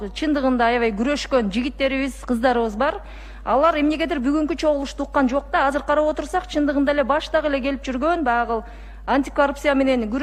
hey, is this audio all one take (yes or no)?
yes